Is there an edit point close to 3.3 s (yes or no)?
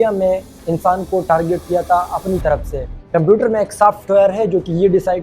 yes